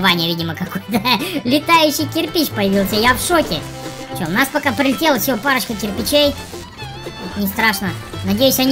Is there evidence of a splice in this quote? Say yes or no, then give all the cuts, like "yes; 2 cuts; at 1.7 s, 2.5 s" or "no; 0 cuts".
yes; 1 cut; at 3.6 s